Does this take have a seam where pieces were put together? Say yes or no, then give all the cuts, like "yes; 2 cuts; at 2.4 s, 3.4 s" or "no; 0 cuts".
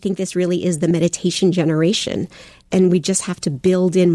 yes; 2 cuts; at 0.9 s, 2.6 s